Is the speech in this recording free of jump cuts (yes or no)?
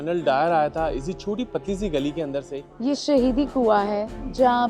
no